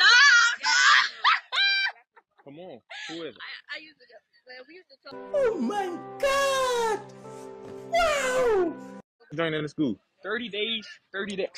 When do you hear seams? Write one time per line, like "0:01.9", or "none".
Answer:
0:09.3